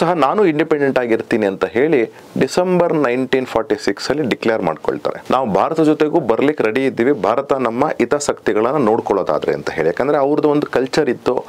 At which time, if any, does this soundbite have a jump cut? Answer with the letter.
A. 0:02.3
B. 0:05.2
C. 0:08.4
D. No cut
B